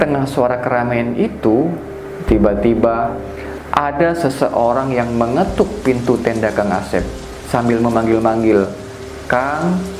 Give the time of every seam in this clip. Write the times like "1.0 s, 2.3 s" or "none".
none